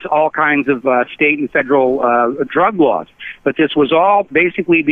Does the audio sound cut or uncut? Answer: uncut